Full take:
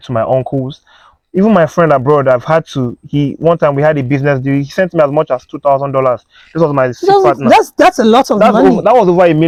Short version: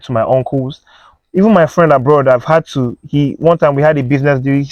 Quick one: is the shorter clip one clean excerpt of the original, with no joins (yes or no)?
yes